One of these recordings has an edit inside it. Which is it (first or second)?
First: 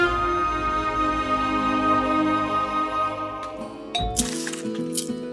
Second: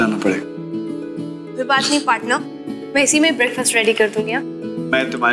first